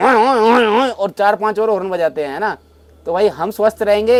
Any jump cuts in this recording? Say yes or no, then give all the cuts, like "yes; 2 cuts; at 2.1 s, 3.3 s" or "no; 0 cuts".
no; 0 cuts